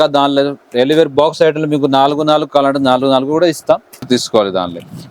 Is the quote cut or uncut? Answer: cut